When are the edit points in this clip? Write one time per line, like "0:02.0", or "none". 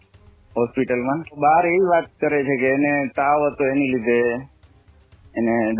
0:01.4